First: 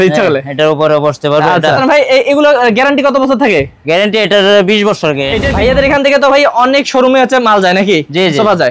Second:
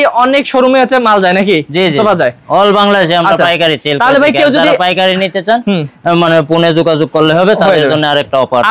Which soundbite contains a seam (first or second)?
first